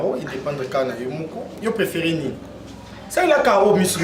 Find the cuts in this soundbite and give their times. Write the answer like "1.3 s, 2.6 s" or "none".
none